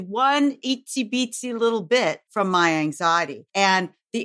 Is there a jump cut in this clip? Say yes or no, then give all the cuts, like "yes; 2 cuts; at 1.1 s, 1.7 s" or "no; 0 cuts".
yes; 2 cuts; at 2.2 s, 3.4 s